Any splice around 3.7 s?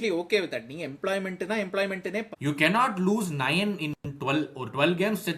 no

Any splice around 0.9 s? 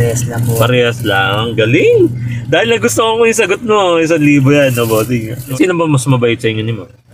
no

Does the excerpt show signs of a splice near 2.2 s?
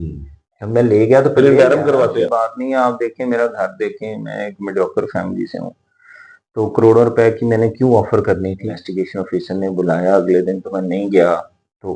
yes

